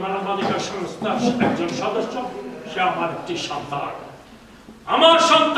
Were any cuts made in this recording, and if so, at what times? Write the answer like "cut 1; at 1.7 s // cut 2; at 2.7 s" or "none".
none